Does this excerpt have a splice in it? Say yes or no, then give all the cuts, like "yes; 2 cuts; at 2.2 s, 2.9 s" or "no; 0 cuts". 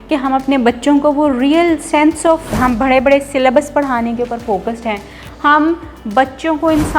yes; 1 cut; at 2.5 s